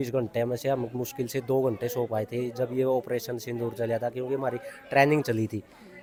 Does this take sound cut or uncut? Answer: uncut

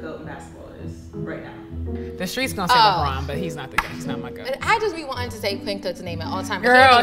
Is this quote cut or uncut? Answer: uncut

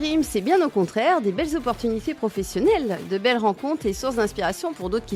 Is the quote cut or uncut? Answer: uncut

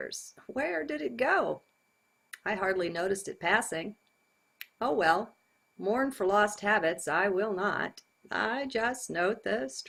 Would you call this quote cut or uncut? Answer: uncut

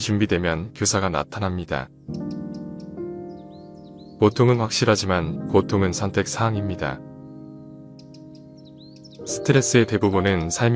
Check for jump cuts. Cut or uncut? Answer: cut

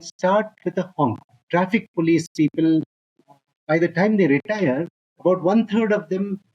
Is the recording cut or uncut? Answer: cut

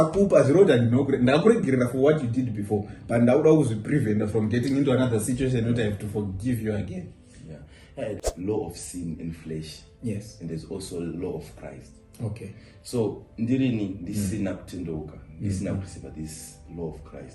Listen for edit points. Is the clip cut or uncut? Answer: cut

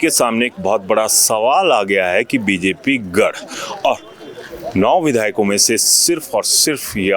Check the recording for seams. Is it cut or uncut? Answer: uncut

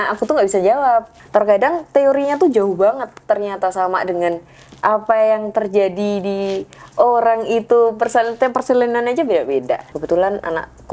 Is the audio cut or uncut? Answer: cut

